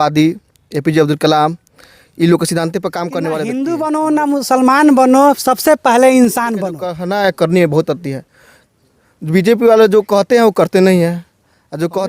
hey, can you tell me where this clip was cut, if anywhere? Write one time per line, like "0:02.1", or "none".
0:03.5
0:07.0